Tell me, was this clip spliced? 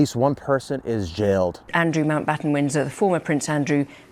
no; 0 cuts

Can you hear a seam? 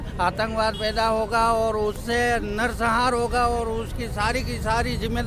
no; 0 cuts

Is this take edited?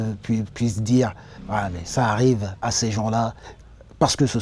yes; 1 cut; at 1.3 s

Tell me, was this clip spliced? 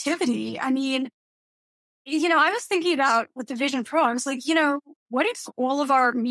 no; 0 cuts

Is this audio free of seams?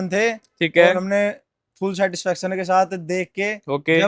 yes; 0 cuts

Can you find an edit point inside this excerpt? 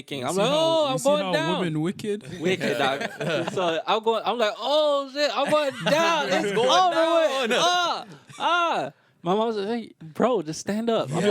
no; 0 cuts

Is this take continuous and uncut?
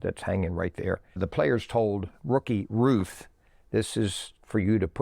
no; 1 cut; at 1.2 s

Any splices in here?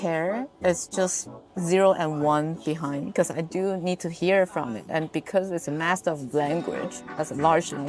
no; 0 cuts

